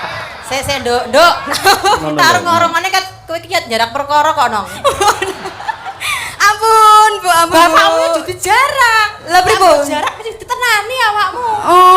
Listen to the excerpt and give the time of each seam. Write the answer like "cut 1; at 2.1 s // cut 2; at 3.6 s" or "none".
cut 1; at 2.0 s